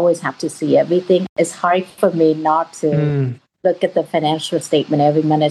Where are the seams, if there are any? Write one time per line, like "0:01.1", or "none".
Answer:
none